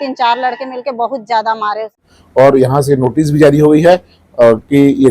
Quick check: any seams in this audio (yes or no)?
yes